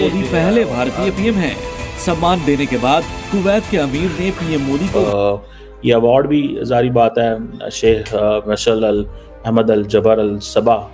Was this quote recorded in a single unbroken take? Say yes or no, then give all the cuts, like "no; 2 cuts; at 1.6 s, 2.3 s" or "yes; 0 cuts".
no; 1 cut; at 5.0 s